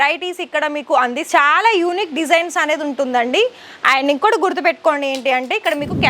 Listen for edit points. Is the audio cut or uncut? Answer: cut